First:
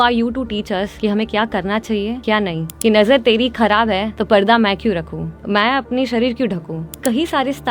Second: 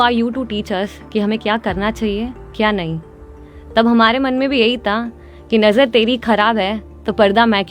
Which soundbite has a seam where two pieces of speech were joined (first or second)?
first